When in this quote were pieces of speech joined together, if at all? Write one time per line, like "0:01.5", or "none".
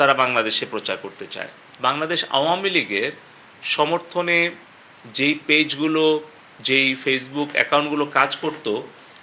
0:01.7